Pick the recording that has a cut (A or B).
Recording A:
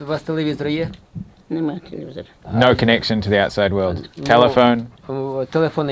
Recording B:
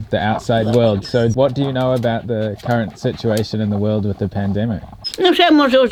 A